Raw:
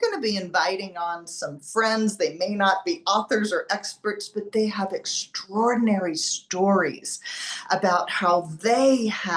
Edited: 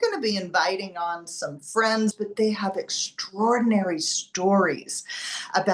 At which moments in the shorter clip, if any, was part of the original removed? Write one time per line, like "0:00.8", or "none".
0:02.1